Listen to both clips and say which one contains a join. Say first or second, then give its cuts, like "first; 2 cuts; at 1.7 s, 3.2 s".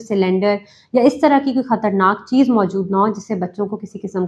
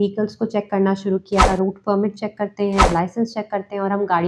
second; 2 cuts; at 1.4 s, 2.9 s